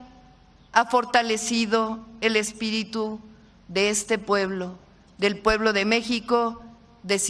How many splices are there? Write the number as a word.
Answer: zero